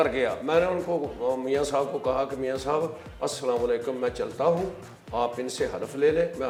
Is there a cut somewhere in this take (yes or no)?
no